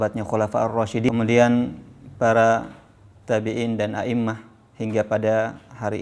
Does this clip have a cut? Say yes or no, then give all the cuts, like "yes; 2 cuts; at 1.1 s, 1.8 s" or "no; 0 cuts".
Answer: yes; 1 cut; at 1.1 s